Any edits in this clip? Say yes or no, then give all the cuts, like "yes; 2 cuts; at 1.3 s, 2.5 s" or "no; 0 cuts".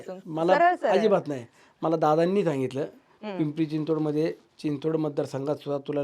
no; 0 cuts